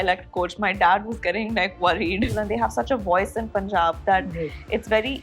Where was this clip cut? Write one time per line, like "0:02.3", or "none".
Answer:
0:02.3